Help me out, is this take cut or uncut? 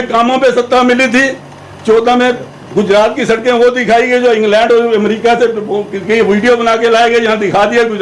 uncut